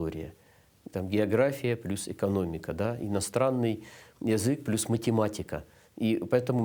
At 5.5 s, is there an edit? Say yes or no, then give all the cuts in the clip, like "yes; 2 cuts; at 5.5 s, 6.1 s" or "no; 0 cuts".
no; 0 cuts